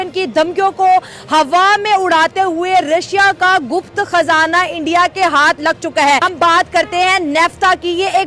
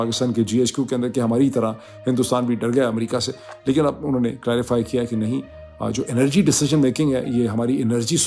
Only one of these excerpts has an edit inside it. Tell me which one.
first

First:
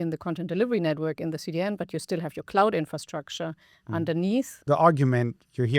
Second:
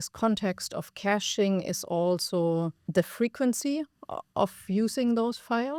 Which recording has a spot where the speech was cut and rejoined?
first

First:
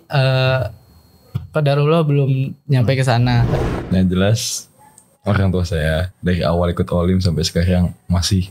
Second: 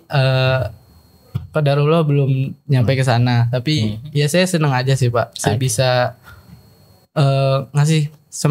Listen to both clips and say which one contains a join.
first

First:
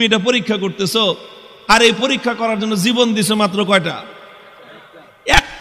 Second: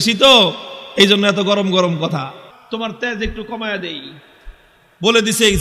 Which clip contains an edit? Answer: second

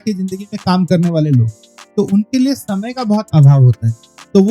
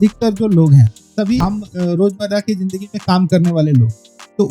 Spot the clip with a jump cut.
second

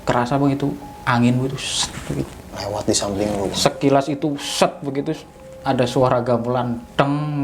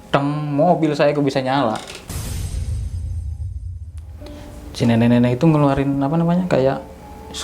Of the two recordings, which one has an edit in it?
second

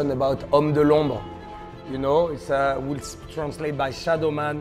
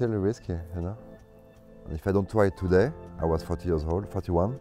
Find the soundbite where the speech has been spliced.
second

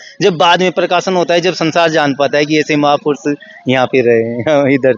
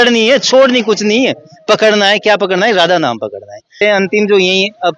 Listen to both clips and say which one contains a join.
second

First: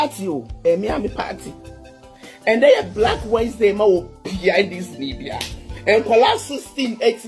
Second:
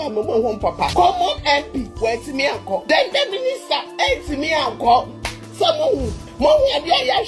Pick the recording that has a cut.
second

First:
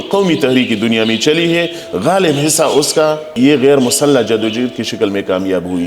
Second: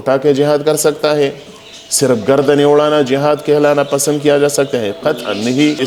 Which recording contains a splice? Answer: first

